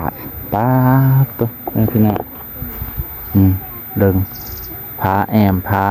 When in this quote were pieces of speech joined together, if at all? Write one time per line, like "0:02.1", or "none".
none